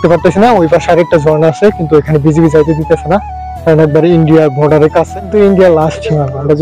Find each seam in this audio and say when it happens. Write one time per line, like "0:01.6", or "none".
0:05.2